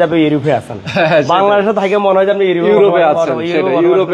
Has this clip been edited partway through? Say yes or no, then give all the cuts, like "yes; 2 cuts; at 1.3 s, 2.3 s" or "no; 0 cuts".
no; 0 cuts